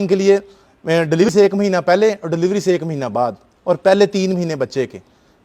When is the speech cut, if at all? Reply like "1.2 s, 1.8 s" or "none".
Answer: 1.3 s